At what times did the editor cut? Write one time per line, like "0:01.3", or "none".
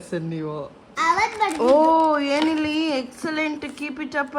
0:00.9